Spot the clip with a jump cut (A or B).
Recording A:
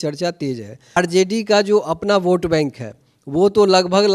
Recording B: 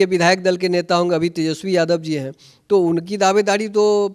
A